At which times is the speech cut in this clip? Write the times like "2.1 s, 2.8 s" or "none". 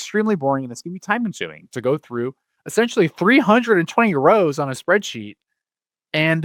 none